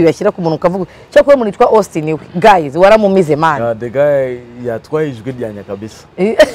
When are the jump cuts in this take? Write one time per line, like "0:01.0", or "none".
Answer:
none